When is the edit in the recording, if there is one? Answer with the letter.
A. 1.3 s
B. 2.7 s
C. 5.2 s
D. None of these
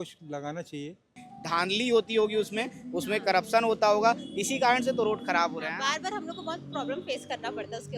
A